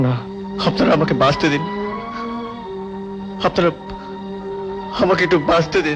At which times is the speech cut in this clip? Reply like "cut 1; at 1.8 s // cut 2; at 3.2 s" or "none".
none